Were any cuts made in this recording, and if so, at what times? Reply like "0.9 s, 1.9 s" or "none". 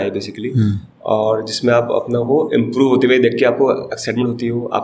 none